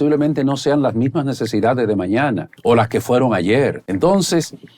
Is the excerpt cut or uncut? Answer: cut